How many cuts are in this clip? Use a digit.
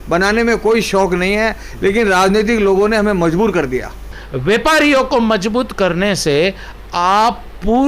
1